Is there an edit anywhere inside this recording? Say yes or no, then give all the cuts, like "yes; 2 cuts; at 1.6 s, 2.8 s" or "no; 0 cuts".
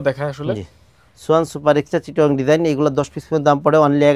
no; 0 cuts